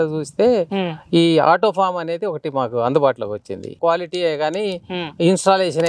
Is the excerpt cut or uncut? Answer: cut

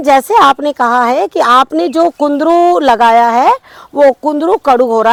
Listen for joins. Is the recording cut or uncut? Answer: uncut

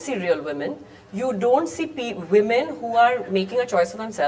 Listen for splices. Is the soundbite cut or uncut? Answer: uncut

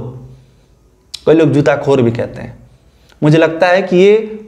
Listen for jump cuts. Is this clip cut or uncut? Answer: uncut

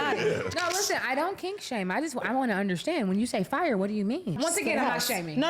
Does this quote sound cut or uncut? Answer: cut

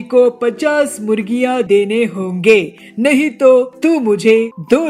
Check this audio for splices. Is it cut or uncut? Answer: uncut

